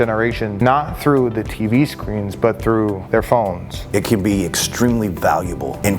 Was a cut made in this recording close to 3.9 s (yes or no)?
yes